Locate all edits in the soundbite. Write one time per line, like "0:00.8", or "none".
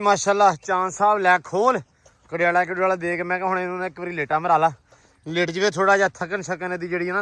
none